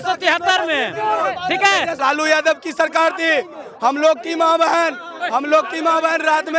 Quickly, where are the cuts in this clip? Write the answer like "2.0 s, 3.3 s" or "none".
2.0 s